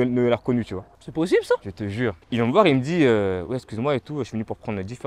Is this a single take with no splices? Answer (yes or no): no